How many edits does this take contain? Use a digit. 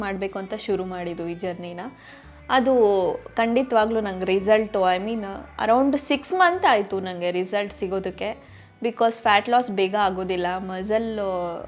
0